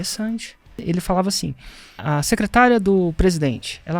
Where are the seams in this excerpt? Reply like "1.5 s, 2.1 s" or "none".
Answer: 0.8 s, 2.0 s

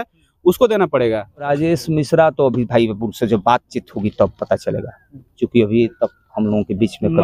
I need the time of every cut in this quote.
1.5 s

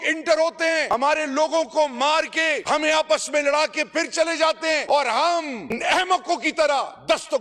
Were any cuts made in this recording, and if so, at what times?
0.9 s, 2.6 s, 4.8 s

